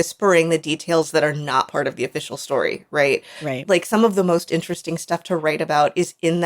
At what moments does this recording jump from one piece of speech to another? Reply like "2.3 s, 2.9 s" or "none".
3.6 s